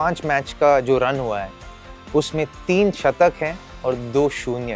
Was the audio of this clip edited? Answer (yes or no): no